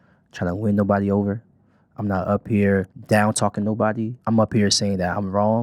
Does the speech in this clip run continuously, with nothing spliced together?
no; 2 cuts; at 3.0 s, 4.2 s

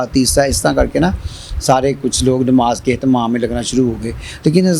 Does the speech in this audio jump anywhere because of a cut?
no; 0 cuts

